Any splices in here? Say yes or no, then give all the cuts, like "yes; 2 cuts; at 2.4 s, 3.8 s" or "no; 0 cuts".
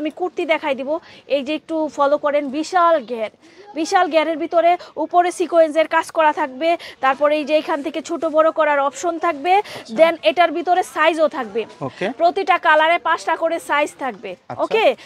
no; 0 cuts